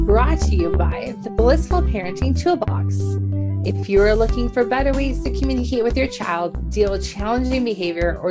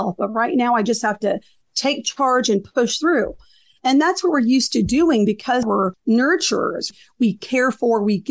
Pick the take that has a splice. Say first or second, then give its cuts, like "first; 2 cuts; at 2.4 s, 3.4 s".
second; 2 cuts; at 5.6 s, 6.9 s